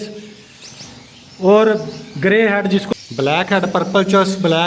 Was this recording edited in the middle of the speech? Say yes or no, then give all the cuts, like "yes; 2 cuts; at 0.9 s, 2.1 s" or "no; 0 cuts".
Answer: yes; 1 cut; at 2.9 s